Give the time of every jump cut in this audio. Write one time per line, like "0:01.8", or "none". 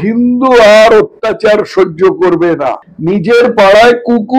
0:02.9